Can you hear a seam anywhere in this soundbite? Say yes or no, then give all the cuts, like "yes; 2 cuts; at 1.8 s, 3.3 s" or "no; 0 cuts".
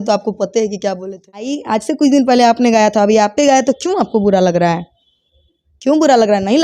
yes; 1 cut; at 1.6 s